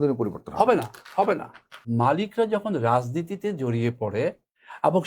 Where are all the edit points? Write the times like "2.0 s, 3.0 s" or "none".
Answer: 1.8 s